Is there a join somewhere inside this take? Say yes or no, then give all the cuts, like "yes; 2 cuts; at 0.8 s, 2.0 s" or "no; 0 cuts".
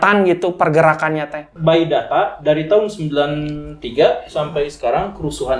yes; 1 cut; at 1.4 s